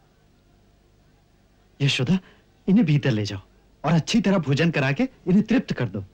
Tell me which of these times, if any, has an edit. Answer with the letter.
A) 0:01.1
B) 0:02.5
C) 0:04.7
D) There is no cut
D